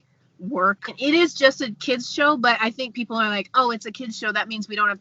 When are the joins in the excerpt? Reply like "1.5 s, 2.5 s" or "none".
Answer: 1.0 s